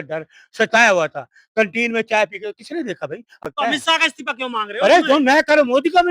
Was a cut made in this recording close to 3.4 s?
yes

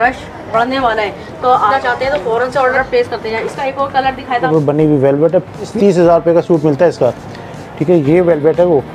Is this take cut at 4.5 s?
yes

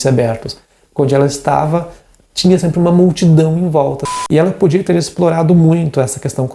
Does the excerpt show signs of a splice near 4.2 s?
yes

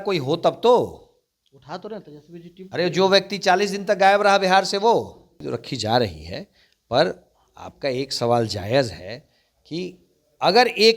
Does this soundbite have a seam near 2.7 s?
no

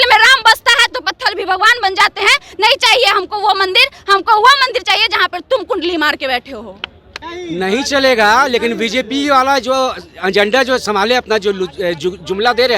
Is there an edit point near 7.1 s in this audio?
no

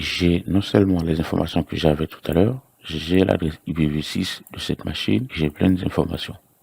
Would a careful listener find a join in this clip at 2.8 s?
no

